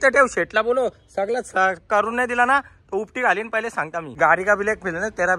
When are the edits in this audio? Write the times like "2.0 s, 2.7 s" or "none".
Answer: 4.1 s